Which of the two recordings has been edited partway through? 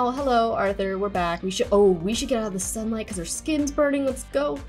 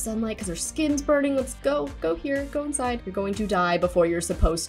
second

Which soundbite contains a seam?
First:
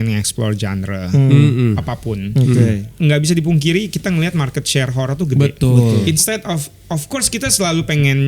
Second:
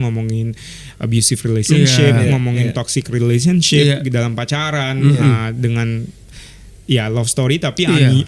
first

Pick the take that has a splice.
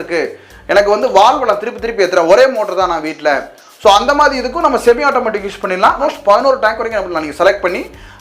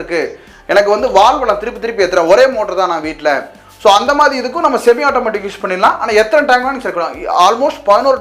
first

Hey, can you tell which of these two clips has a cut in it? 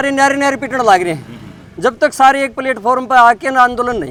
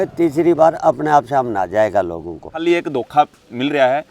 second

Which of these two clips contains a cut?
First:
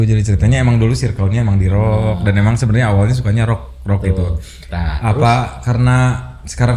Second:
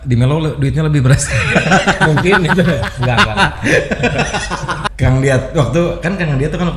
second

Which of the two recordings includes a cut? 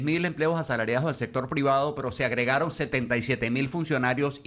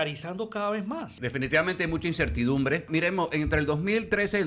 second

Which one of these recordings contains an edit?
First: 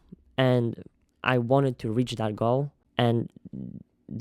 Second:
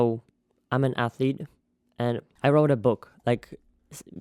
first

